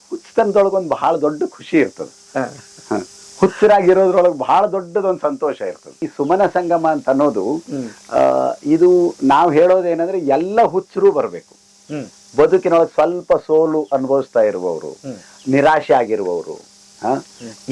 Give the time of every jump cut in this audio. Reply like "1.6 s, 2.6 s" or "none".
6.0 s